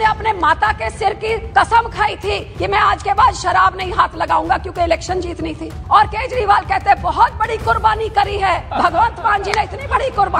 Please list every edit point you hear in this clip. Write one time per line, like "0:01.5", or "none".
0:01.4
0:02.5
0:05.7
0:08.7